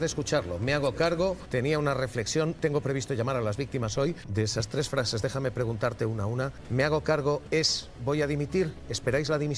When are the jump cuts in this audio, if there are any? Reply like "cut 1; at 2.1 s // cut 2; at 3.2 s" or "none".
cut 1; at 1.4 s // cut 2; at 2.6 s // cut 3; at 4.2 s // cut 4; at 7.4 s